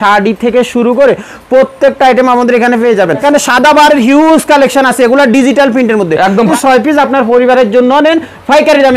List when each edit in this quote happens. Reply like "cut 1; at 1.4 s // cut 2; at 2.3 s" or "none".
cut 1; at 3.2 s // cut 2; at 6.5 s